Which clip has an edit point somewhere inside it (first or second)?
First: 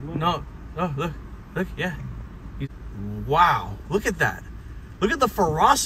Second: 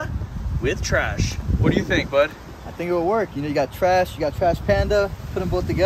first